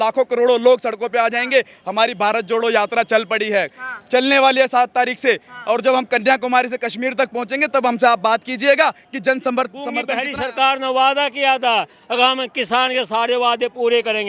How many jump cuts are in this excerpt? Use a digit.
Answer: 1